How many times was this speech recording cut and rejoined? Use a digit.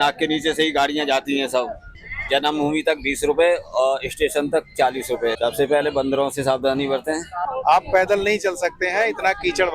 3